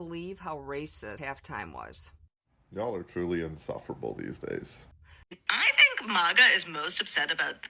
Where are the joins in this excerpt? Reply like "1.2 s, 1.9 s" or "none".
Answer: 1.2 s, 5.4 s